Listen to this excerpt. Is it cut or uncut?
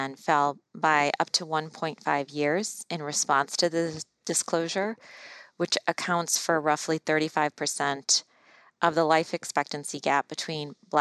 uncut